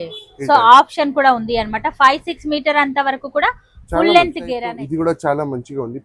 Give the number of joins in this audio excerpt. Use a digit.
1